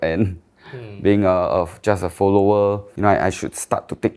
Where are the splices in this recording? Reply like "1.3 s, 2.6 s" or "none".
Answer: 2.9 s